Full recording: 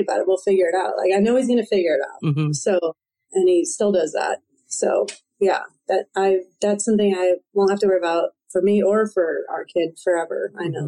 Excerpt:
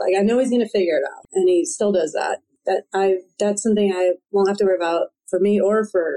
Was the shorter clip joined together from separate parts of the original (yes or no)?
yes